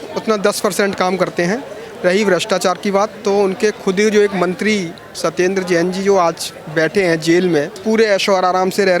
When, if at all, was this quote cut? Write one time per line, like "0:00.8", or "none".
0:07.7